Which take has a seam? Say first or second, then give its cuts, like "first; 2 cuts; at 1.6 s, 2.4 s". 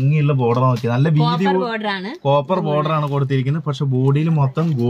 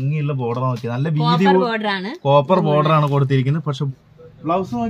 second; 1 cut; at 3.8 s